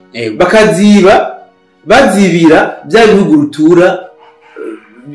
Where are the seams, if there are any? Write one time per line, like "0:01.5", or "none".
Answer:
none